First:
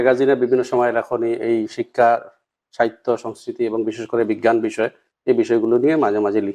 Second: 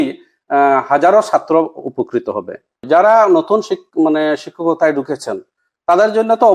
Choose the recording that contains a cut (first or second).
second